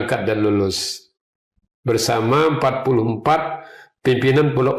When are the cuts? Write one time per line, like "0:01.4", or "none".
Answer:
none